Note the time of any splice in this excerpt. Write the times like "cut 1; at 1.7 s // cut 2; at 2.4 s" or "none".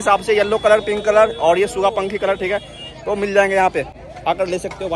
none

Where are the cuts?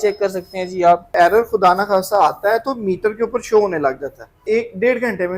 cut 1; at 1.1 s // cut 2; at 4.4 s

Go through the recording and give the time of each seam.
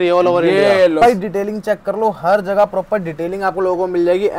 cut 1; at 1.0 s

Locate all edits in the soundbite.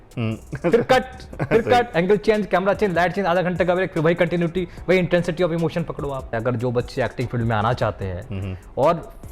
cut 1; at 6.3 s

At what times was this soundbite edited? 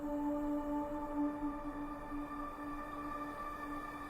cut 1; at 2.0 s

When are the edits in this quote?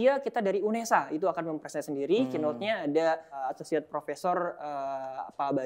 cut 1; at 3.4 s

